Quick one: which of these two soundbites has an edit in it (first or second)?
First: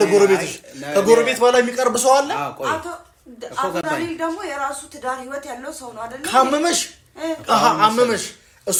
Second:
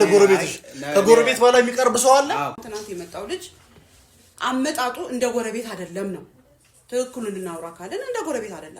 second